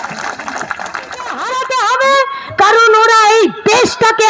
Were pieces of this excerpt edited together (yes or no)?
yes